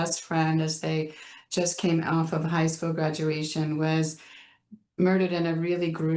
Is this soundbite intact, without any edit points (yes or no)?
yes